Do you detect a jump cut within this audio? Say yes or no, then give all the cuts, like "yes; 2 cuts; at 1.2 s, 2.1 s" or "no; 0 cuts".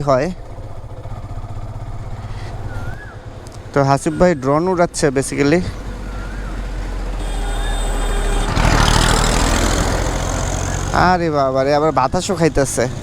yes; 1 cut; at 2.6 s